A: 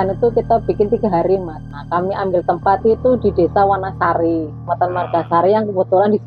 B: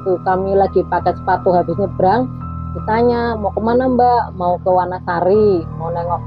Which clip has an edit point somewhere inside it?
A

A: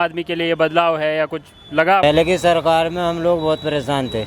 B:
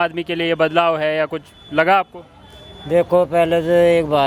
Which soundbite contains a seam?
A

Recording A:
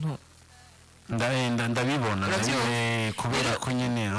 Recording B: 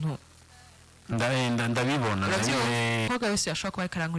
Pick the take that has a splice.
B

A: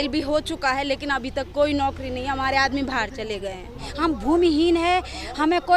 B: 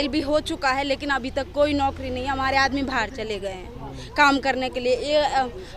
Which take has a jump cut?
A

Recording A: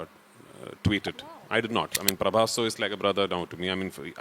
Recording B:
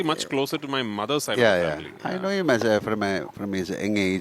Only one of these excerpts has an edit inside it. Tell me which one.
A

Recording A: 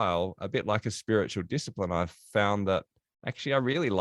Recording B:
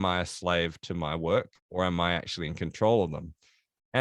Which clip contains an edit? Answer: B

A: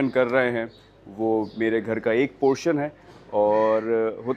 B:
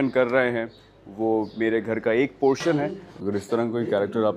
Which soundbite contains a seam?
B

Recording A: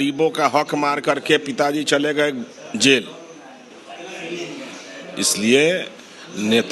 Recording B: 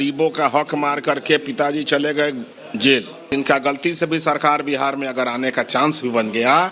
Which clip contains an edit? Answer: B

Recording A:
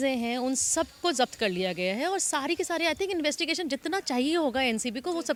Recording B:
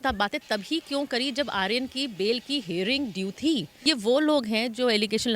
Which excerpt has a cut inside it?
B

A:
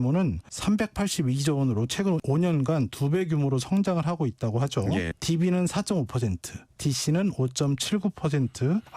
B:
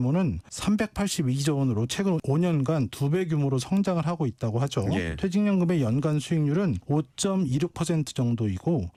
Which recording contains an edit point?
A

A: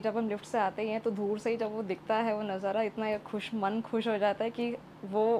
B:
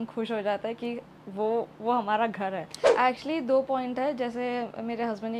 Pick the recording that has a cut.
B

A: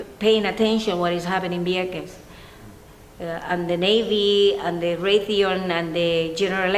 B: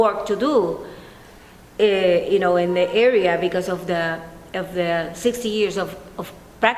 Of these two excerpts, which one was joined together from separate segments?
B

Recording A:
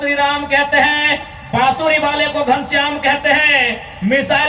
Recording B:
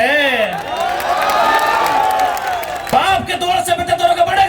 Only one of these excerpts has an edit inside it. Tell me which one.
B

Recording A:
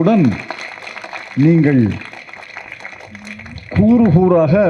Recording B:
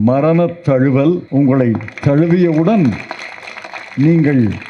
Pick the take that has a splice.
B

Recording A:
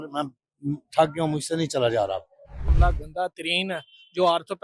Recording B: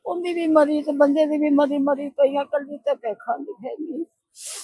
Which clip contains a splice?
A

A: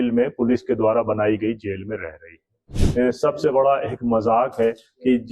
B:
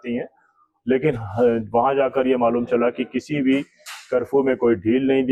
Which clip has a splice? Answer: A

